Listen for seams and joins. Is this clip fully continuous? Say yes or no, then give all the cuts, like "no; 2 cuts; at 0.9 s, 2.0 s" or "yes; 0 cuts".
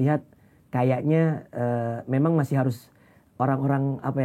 yes; 0 cuts